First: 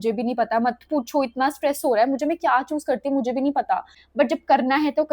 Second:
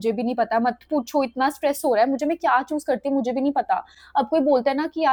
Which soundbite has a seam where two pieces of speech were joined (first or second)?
first